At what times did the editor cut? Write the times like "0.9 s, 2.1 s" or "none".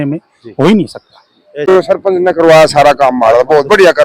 1.7 s